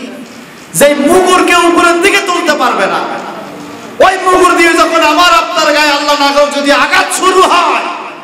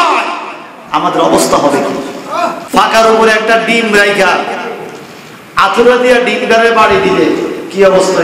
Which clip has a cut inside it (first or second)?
second